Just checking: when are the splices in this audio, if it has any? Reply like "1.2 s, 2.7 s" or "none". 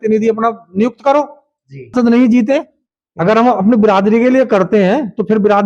1.9 s